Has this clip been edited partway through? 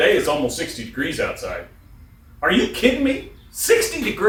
no; 0 cuts

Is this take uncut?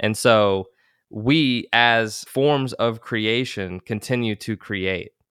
no; 1 cut; at 2.2 s

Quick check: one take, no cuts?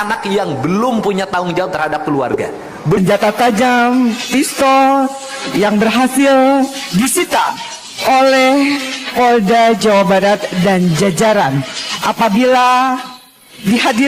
no; 1 cut; at 3.0 s

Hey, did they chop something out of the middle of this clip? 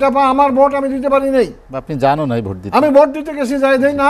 no; 0 cuts

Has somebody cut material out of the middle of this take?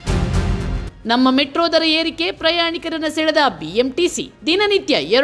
no; 0 cuts

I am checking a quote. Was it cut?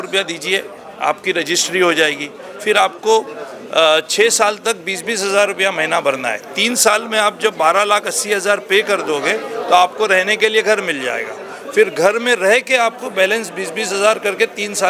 no; 0 cuts

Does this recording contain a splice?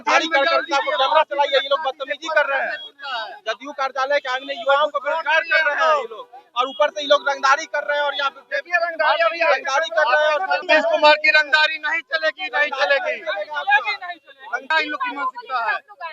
yes; 2 cuts; at 10.6 s, 14.6 s

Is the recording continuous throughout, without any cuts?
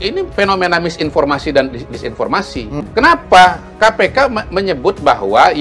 no; 1 cut; at 2.8 s

